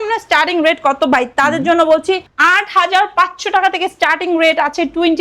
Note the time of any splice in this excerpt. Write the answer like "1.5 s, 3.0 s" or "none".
none